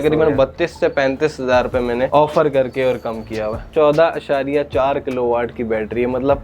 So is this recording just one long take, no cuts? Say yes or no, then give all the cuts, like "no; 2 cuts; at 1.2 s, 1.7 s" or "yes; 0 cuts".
no; 2 cuts; at 2.1 s, 3.7 s